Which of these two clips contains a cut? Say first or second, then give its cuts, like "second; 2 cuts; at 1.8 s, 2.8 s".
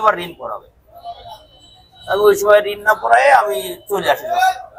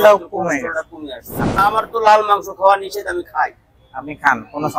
second; 1 cut; at 1.6 s